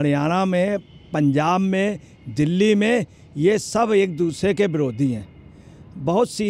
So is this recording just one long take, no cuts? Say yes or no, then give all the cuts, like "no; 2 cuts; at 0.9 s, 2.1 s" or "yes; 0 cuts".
yes; 0 cuts